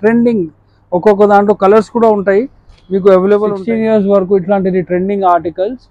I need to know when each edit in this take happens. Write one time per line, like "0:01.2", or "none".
0:03.6